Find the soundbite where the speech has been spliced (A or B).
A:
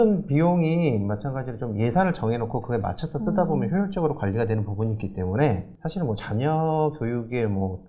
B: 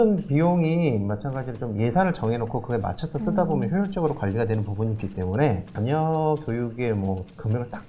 B